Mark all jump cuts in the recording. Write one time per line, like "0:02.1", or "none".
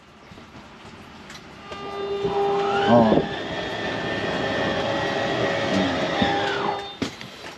none